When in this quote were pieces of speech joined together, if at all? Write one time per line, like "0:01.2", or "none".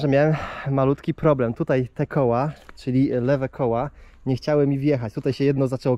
none